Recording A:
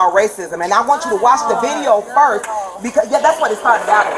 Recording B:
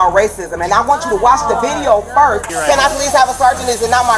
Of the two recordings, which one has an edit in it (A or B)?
B